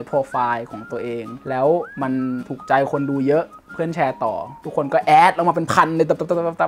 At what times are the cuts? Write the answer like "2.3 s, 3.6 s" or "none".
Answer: 1.3 s, 2.1 s